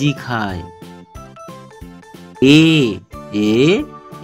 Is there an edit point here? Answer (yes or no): no